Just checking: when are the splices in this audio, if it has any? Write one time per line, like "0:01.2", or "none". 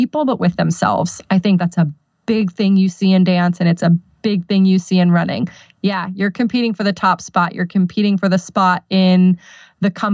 none